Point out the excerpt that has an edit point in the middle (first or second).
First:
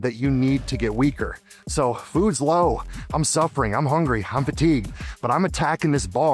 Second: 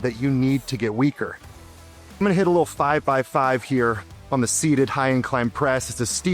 second